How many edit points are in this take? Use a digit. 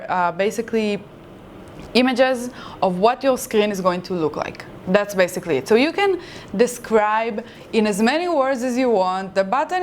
0